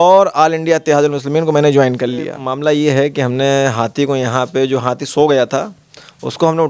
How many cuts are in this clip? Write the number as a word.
one